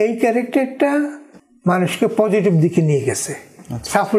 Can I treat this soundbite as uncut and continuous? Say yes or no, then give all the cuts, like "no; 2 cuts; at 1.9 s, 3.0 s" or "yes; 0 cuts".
yes; 0 cuts